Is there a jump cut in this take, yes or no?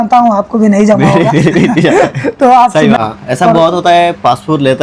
yes